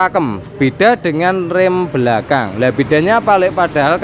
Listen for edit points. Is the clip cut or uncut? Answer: uncut